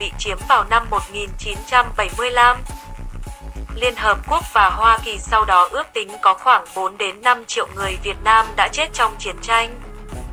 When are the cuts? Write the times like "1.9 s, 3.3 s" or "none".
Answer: none